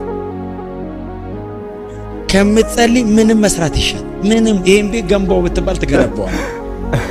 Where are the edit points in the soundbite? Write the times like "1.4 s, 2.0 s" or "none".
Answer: none